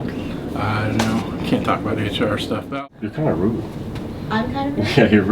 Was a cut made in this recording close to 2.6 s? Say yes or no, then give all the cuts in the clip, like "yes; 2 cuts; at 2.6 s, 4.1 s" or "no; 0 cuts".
yes; 1 cut; at 2.6 s